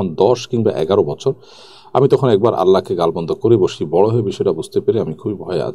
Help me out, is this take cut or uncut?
uncut